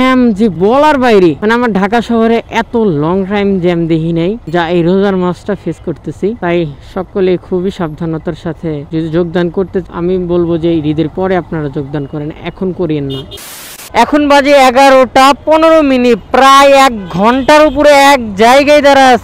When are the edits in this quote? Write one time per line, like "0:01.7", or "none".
none